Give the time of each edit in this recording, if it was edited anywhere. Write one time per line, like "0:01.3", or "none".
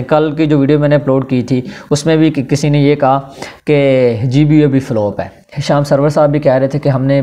0:05.5